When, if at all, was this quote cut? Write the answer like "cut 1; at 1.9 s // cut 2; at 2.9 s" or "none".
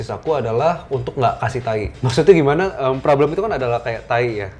cut 1; at 2.0 s

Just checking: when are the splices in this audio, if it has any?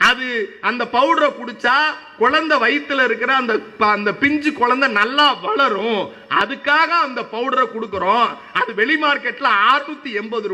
none

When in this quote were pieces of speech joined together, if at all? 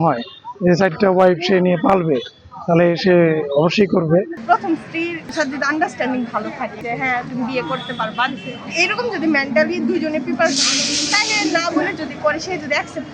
cut 1; at 4.3 s // cut 2; at 5.3 s // cut 3; at 6.8 s

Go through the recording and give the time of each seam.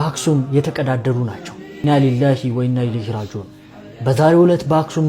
none

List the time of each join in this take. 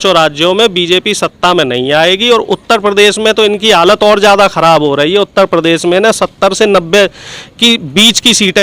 none

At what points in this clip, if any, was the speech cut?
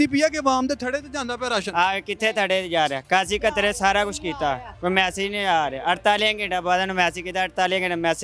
none

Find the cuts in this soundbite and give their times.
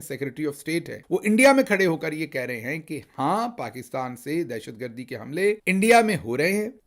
cut 1; at 1.0 s // cut 2; at 5.6 s

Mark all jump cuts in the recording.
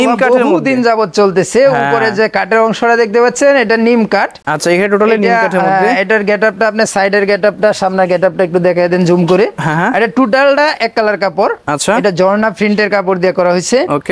none

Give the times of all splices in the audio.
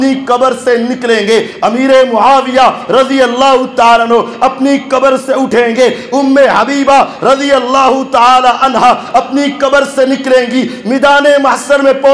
none

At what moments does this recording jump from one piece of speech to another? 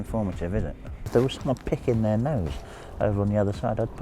cut 1; at 1.1 s

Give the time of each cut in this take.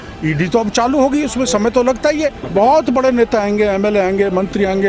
cut 1; at 2.4 s

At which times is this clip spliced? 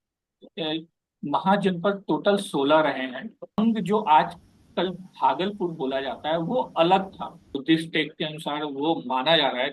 cut 1; at 3.6 s // cut 2; at 7.5 s

